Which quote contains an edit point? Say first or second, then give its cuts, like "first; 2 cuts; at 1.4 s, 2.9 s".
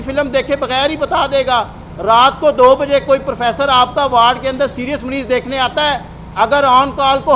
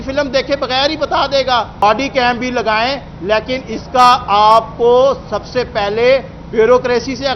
second; 1 cut; at 1.8 s